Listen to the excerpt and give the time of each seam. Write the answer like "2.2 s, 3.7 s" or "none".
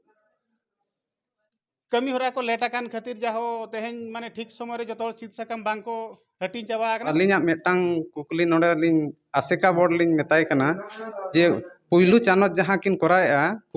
7.1 s